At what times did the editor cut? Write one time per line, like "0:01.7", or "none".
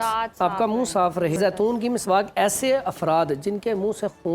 0:01.4